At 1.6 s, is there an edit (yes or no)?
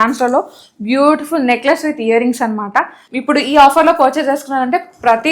no